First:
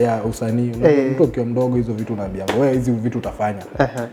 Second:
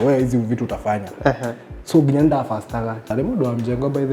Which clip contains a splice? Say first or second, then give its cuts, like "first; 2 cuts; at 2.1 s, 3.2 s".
second; 1 cut; at 3.1 s